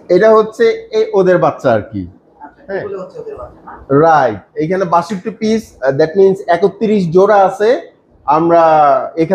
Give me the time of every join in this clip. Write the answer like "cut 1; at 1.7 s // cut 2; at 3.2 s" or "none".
none